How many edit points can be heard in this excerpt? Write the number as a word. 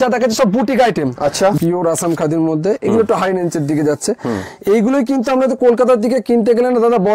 one